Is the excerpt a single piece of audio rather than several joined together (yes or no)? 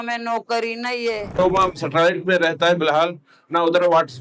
no